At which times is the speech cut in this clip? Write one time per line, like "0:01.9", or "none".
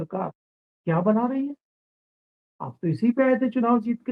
none